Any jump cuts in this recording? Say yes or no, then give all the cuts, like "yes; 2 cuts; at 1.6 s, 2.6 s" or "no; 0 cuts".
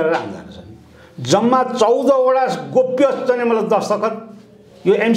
no; 0 cuts